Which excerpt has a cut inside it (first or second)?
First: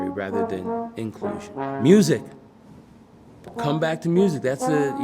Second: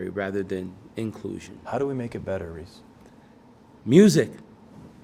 first